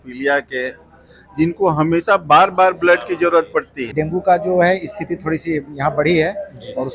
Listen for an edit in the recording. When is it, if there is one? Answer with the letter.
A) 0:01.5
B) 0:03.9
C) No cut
B